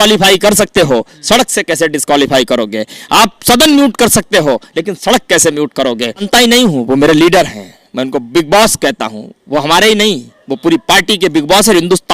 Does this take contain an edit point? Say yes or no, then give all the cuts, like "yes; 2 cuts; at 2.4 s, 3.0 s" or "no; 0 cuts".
yes; 1 cut; at 6.3 s